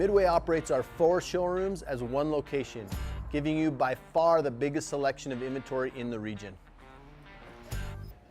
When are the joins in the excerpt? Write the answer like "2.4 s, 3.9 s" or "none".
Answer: 1.1 s

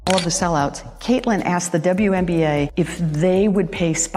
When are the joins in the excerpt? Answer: none

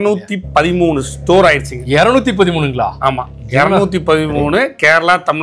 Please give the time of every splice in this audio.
none

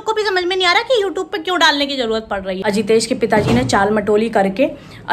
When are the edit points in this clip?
2.5 s

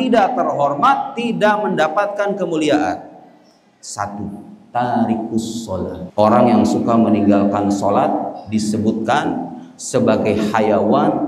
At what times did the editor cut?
4.5 s, 6.0 s

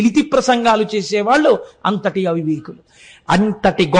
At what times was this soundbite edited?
none

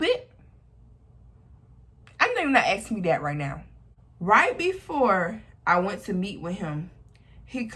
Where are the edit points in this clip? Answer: 3.5 s

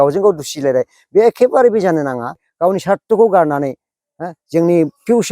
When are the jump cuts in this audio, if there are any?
2.4 s

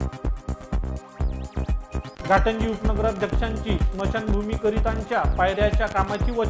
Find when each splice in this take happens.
1.1 s

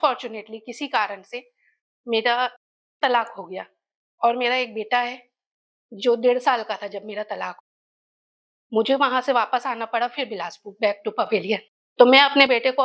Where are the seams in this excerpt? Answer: 11.8 s

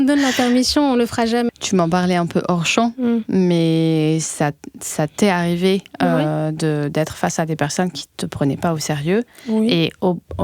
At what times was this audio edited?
1.5 s

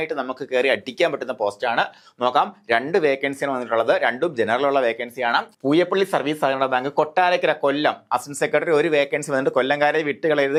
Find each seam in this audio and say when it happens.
none

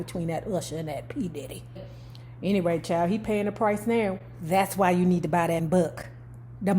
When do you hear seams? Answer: 2.0 s, 5.7 s

